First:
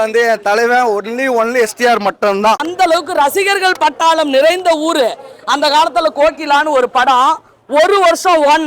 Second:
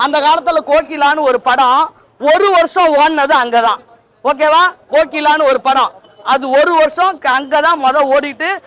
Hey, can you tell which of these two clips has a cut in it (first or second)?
first